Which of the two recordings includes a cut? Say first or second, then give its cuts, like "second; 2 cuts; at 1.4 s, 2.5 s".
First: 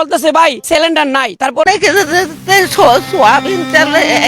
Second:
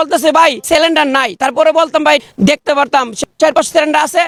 first; 1 cut; at 1.6 s